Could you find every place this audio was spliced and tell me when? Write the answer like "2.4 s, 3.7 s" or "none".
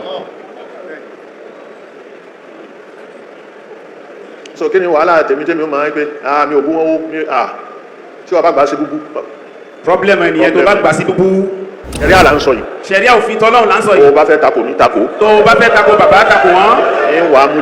12.0 s

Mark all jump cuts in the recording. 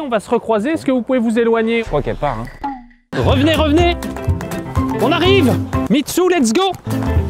1.8 s, 5.8 s

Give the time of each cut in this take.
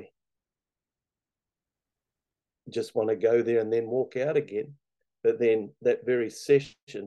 none

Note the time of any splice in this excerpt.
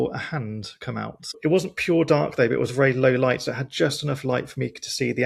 none

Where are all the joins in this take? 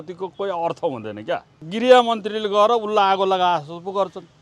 1.6 s

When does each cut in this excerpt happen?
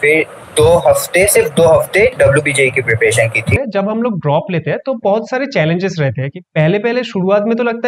3.5 s

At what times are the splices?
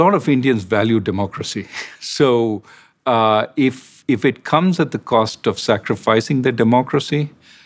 none

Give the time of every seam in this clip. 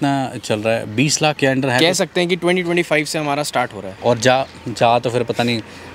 1.4 s, 3.8 s

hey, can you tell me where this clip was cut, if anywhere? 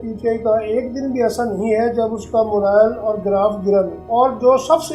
4.0 s

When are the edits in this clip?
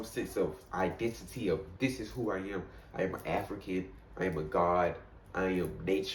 none

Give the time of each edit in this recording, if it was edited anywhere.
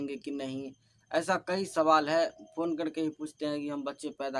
none

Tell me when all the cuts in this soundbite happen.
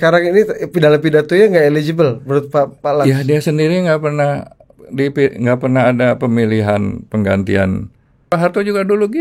8.3 s

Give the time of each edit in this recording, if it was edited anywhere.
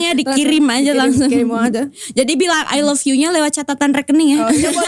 none

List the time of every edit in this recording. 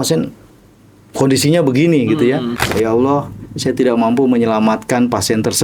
2.7 s

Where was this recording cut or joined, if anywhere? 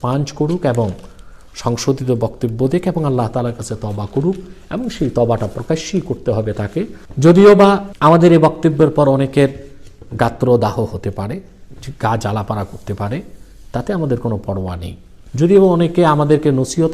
7.0 s, 7.9 s

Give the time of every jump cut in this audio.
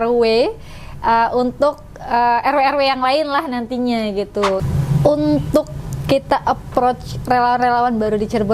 4.6 s

